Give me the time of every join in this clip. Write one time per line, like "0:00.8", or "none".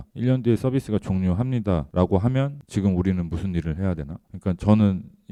none